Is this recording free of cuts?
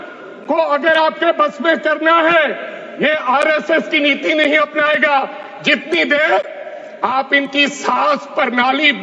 yes; 0 cuts

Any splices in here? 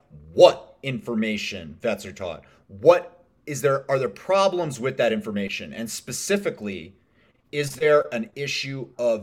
yes; 1 cut; at 1.7 s

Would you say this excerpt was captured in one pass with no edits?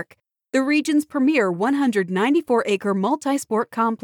yes; 0 cuts

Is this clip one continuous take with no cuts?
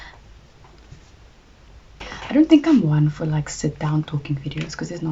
no; 1 cut; at 1.9 s

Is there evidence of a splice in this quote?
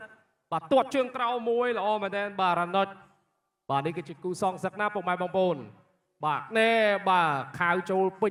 no; 0 cuts

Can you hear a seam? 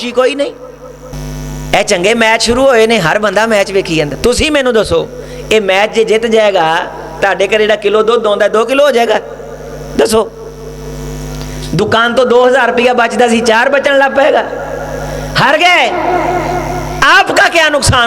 yes; 1 cut; at 1.1 s

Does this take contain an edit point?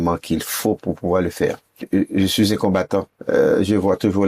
yes; 2 cuts; at 1.8 s, 3.1 s

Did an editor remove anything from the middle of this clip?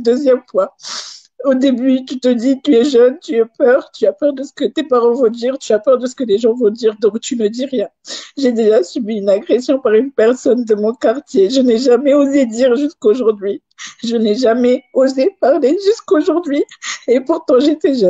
yes; 1 cut; at 5.0 s

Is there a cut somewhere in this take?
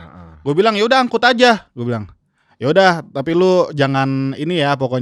no; 0 cuts

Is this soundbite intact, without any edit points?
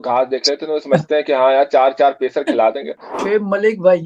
no; 1 cut; at 3.1 s

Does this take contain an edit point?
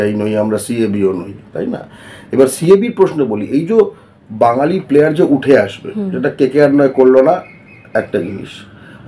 no; 0 cuts

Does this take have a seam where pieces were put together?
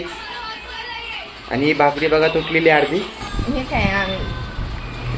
yes; 1 cut; at 3.2 s

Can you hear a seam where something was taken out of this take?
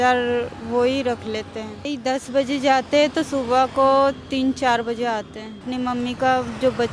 yes; 2 cuts; at 1.9 s, 5.7 s

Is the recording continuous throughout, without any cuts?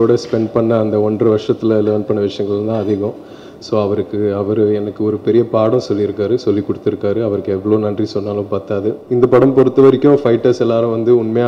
no; 1 cut; at 9.0 s

